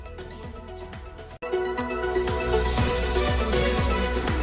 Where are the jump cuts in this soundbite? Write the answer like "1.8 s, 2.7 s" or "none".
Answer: none